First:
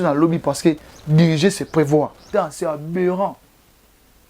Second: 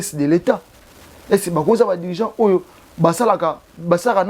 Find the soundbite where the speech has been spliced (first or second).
first